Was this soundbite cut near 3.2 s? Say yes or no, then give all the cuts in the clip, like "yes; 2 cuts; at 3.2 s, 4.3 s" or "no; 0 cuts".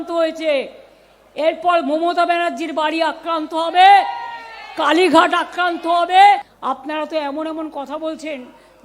no; 1 cut; at 6.5 s